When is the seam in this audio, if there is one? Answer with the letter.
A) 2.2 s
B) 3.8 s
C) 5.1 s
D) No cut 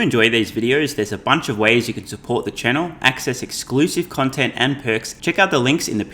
C